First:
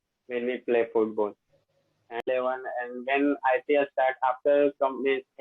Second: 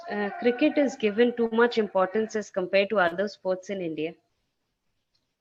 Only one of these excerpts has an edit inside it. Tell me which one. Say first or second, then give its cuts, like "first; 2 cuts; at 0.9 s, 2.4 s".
first; 1 cut; at 2.2 s